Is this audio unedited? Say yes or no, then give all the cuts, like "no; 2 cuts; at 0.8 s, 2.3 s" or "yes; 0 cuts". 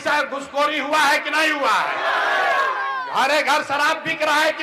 yes; 0 cuts